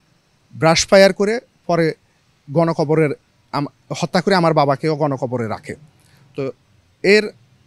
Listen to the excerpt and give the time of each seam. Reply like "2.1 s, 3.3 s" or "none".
none

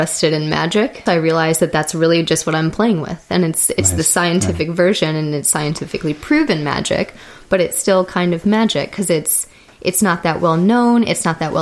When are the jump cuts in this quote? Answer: 1.0 s

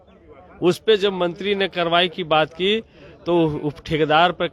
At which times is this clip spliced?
none

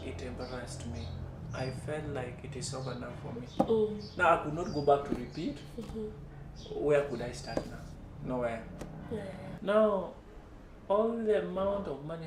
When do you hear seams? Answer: 9.5 s

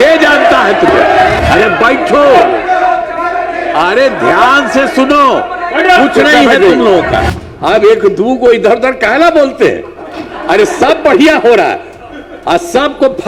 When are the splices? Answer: 1.4 s, 7.3 s

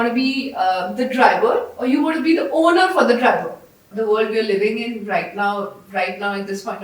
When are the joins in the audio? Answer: 3.9 s

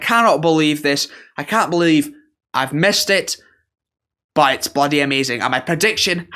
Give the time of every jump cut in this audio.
none

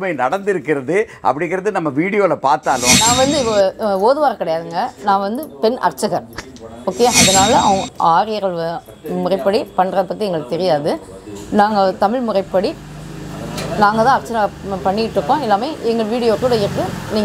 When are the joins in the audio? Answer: 3.1 s, 7.2 s

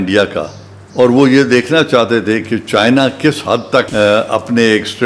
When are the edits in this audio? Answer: 3.9 s

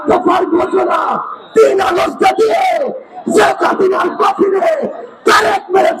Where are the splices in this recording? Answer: none

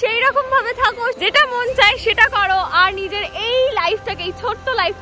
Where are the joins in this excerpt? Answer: 1.2 s

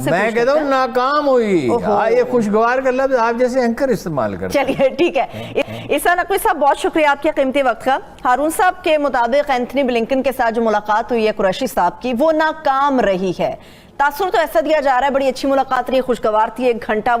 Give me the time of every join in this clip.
none

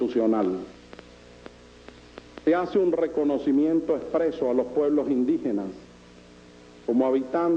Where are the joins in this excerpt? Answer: none

